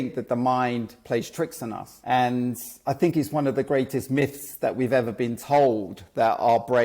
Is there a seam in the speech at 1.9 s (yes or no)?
yes